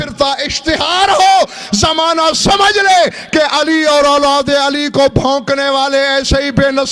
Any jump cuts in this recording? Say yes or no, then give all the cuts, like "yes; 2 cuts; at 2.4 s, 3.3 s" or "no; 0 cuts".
no; 0 cuts